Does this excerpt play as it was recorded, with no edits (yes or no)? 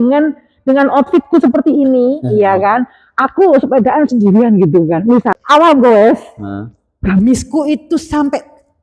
no